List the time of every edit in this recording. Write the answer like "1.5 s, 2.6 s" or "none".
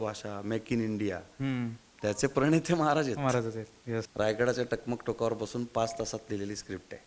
4.1 s